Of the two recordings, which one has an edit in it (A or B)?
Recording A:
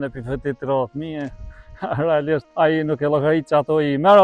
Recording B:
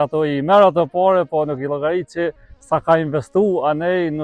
A